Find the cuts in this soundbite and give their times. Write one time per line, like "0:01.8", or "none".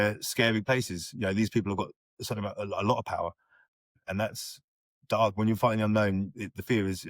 0:04.0